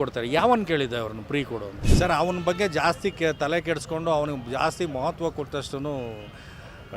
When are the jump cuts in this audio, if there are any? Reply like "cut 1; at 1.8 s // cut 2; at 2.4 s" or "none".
cut 1; at 1.8 s